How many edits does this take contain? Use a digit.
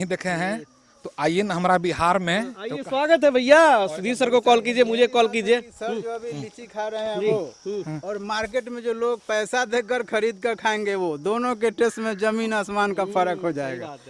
0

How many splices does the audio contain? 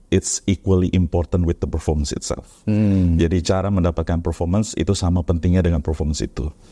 0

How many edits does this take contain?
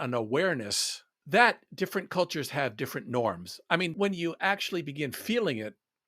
1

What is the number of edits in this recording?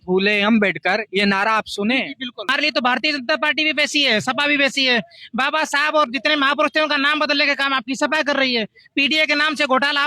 1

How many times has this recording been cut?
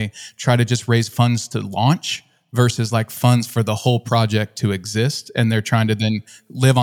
0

